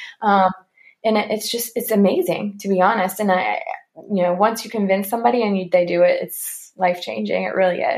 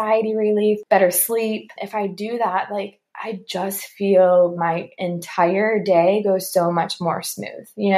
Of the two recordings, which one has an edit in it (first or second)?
second